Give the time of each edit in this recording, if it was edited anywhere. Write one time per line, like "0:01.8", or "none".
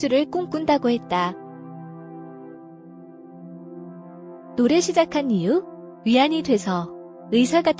0:01.3
0:04.6